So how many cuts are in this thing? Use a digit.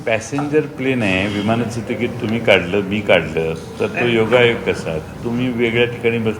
0